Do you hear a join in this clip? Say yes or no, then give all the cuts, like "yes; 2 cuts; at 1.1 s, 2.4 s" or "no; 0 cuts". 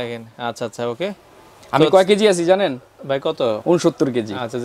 no; 0 cuts